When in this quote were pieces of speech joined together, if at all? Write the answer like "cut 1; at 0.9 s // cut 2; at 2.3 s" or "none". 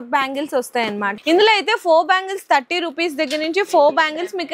cut 1; at 1.1 s